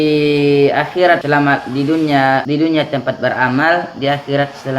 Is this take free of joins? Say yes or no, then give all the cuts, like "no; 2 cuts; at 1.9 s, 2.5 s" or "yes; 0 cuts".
no; 2 cuts; at 1.2 s, 2.4 s